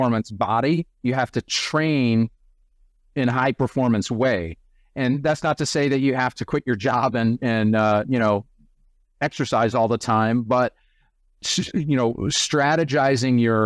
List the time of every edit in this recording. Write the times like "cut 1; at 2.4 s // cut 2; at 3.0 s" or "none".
none